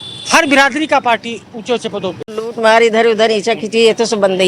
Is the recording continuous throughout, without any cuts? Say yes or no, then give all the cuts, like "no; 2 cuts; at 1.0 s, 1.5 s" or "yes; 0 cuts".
no; 1 cut; at 2.6 s